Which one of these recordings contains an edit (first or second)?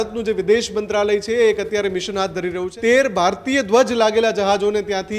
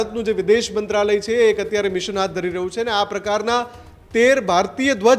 first